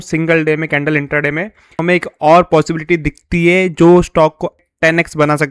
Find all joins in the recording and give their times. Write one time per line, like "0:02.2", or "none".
0:01.8
0:04.6